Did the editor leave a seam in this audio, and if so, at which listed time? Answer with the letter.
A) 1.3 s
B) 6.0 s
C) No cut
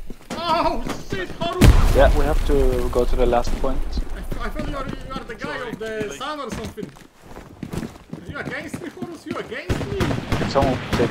C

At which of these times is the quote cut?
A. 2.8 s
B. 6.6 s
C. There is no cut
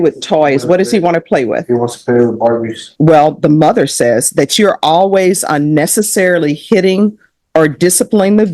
A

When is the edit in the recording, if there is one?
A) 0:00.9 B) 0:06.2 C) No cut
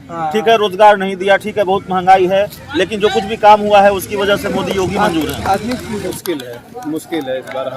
B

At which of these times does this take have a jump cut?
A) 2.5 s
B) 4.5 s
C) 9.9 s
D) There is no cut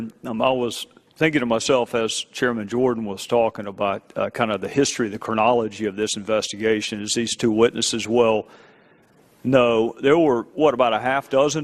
A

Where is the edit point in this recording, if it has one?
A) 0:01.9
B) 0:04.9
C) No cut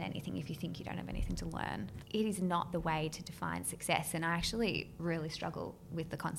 A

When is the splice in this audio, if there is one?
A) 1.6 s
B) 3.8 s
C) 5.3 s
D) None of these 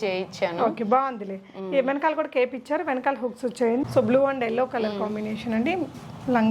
B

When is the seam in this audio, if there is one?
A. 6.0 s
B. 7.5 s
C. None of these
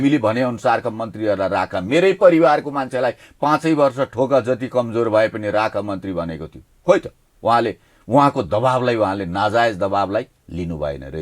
C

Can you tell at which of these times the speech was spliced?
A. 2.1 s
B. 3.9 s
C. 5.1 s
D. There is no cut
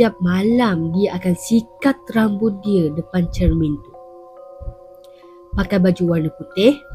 D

